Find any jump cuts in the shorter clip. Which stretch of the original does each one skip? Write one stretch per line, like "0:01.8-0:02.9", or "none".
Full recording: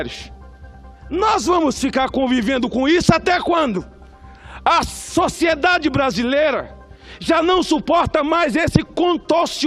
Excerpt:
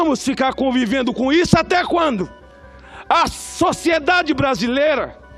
none